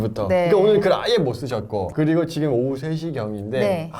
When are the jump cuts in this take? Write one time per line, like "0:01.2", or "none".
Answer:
0:01.9